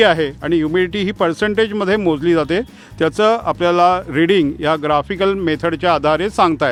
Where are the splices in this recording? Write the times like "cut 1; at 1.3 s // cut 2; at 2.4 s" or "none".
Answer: none